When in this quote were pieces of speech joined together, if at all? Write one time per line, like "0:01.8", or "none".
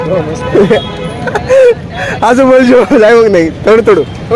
none